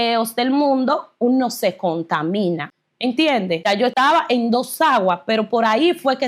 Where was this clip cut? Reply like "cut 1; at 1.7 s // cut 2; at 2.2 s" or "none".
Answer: cut 1; at 2.7 s // cut 2; at 3.9 s